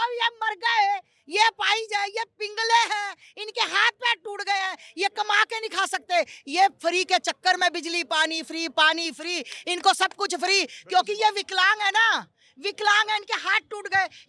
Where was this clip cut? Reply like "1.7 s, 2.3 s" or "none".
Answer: none